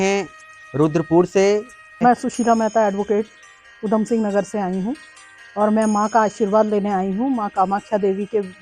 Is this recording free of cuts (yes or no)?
no